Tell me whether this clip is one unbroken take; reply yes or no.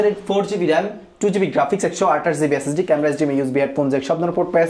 yes